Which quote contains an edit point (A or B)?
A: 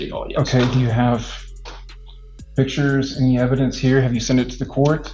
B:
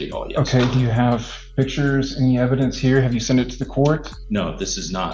B